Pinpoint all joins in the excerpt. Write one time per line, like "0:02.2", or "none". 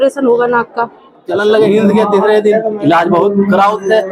0:01.3